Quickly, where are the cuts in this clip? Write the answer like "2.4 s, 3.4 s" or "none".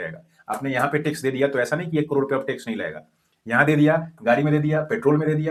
none